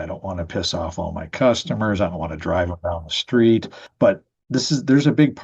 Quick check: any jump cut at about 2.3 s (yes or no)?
no